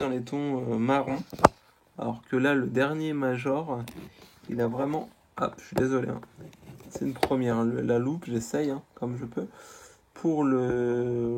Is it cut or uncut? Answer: uncut